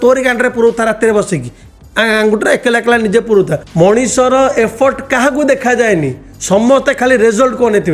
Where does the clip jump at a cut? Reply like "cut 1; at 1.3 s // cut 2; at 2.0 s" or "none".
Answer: cut 1; at 3.6 s